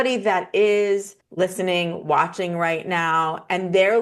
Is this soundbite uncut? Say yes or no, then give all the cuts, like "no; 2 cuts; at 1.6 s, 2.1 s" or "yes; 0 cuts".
no; 1 cut; at 1.2 s